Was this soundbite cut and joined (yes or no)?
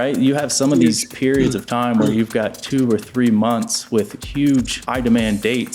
yes